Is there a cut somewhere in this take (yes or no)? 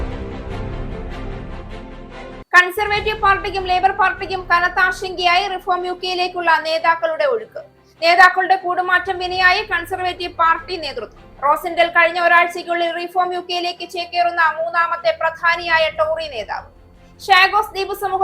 yes